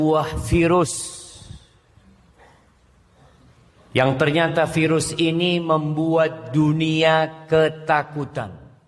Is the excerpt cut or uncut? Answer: uncut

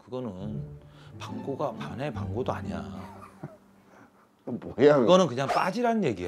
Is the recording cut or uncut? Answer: uncut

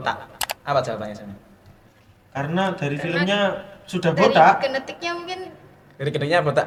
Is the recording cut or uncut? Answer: uncut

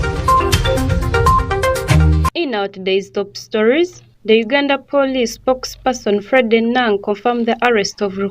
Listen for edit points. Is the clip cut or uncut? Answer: cut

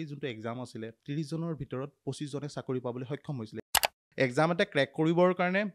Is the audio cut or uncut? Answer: cut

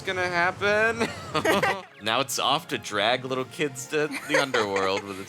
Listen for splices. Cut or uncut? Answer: cut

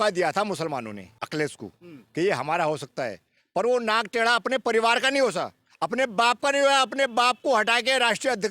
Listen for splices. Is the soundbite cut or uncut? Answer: cut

